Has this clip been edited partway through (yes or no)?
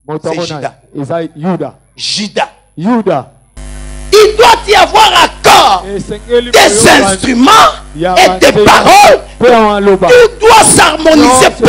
yes